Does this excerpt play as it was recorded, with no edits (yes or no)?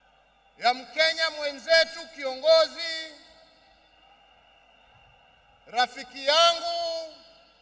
yes